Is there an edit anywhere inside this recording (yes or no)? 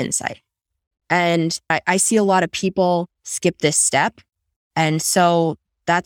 yes